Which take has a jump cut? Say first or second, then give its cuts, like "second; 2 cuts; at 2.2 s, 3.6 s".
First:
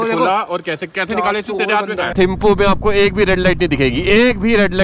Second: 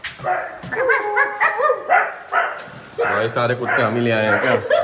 first; 1 cut; at 2.1 s